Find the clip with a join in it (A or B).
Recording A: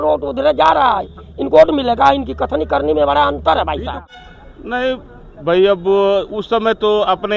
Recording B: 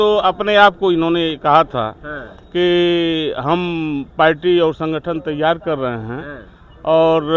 A